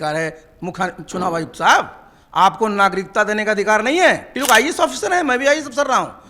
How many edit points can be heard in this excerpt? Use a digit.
1